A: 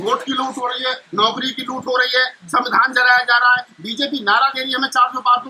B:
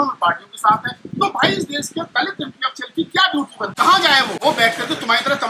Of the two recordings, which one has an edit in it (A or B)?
B